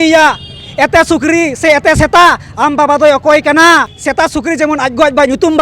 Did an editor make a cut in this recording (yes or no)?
yes